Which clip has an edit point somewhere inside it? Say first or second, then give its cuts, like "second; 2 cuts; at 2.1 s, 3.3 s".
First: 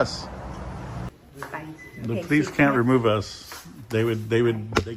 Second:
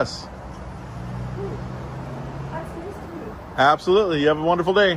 first; 1 cut; at 1.1 s